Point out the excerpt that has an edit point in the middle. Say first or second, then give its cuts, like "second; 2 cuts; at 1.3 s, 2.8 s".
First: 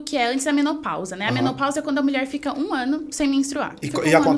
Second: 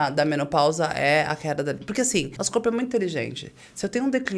second; 1 cut; at 2.4 s